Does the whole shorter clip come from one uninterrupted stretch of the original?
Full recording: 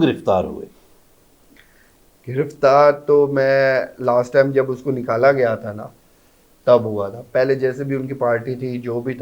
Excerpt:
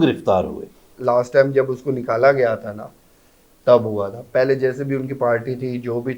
no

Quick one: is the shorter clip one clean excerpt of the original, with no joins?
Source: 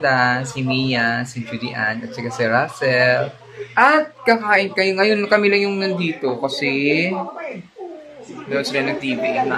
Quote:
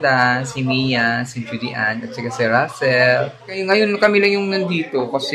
no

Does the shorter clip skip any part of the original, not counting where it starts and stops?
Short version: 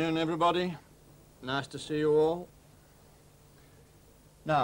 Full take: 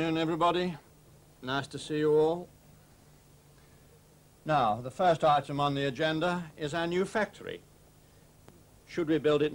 no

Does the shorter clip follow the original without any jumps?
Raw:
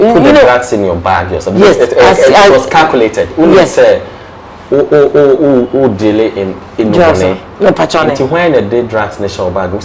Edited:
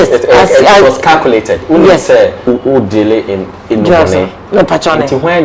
no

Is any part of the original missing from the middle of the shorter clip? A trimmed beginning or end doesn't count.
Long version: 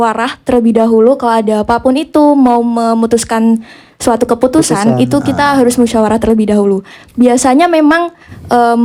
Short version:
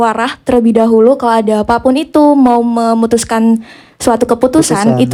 no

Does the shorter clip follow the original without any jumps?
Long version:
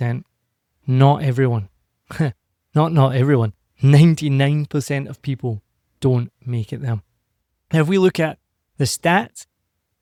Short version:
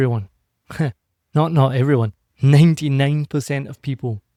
yes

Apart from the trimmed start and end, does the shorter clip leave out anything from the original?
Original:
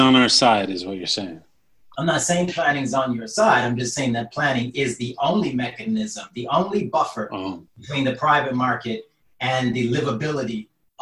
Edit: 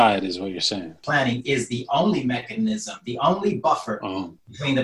yes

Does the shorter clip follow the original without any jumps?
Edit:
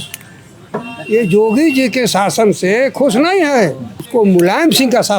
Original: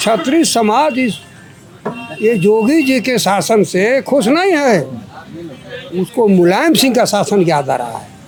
no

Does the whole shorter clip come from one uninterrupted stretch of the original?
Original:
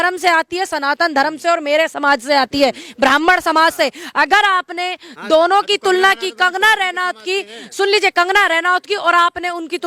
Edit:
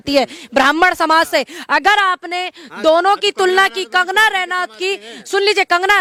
yes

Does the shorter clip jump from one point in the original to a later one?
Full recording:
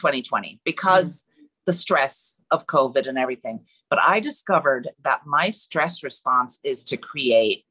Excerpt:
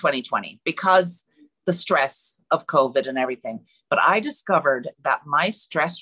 no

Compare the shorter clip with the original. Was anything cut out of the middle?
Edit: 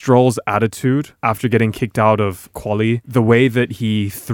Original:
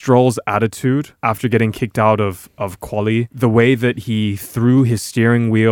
yes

